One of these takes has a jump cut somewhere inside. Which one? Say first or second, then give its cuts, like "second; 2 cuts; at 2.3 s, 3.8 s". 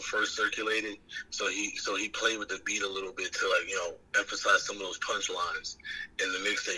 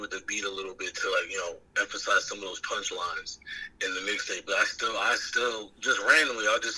second; 1 cut; at 5.7 s